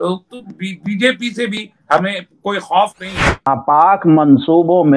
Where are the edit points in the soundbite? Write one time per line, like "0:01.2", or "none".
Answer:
0:03.5